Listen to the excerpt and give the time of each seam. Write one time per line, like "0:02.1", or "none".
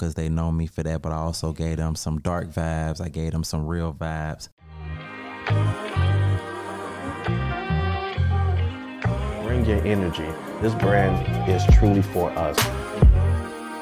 0:04.4